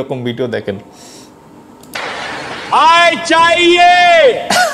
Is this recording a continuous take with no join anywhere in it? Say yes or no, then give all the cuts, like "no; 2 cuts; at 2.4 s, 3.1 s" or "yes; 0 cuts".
yes; 0 cuts